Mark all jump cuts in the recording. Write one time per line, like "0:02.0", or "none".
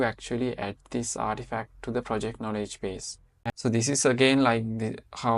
0:03.4